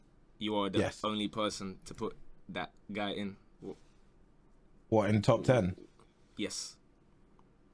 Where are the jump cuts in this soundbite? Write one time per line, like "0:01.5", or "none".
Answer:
none